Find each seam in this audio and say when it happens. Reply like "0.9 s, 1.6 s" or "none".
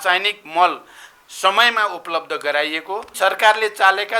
3.1 s